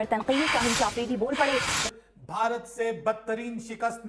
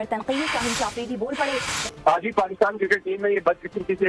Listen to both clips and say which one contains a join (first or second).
first